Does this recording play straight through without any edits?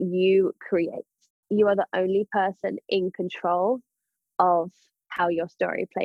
no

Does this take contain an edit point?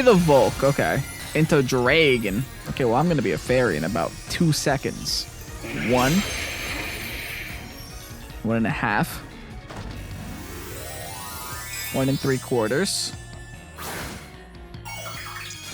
yes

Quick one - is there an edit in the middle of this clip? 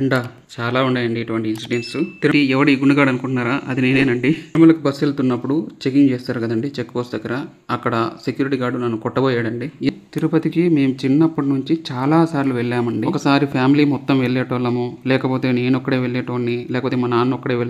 yes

